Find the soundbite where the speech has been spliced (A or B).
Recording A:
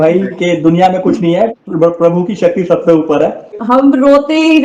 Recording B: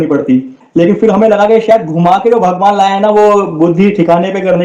A